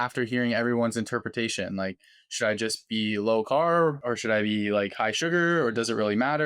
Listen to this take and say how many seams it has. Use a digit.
1